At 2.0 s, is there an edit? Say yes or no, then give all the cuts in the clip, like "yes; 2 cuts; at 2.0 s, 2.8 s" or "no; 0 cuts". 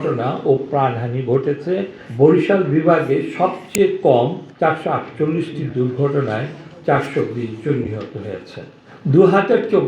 yes; 2 cuts; at 2.0 s, 4.4 s